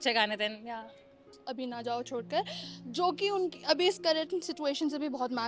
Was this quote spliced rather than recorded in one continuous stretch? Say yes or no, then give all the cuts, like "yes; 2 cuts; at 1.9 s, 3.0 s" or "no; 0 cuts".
yes; 1 cut; at 1.4 s